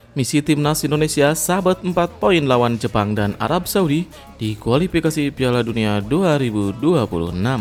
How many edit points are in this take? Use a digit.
0